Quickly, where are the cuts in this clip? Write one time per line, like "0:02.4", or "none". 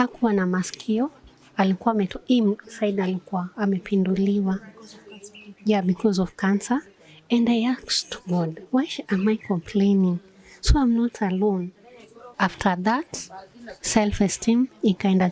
0:12.3